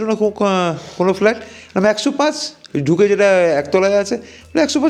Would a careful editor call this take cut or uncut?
uncut